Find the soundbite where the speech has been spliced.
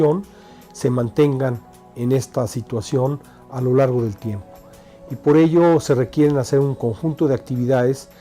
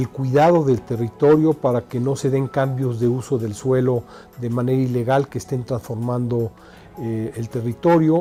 first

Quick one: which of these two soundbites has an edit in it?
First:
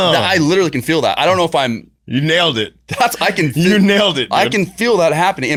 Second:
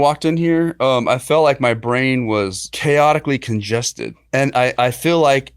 second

